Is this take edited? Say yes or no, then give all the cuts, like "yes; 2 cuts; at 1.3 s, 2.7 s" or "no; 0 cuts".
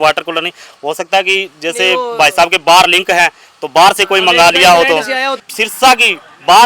yes; 1 cut; at 5.4 s